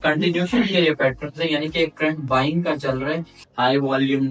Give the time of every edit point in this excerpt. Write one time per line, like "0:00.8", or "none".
0:03.4